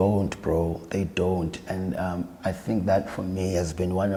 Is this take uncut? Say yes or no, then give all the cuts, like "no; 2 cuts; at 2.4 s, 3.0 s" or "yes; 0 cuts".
yes; 0 cuts